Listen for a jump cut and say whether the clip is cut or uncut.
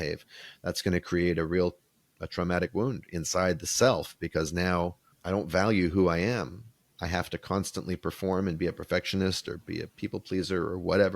cut